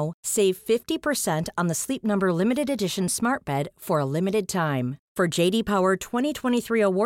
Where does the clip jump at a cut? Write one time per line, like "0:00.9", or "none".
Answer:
none